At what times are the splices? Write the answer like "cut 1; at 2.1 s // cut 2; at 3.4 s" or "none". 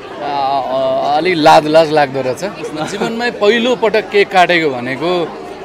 cut 1; at 2.6 s